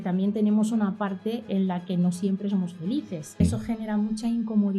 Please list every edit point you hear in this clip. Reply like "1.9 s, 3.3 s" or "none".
1.5 s, 3.4 s